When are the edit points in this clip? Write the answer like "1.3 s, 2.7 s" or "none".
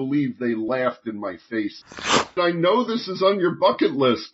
2.2 s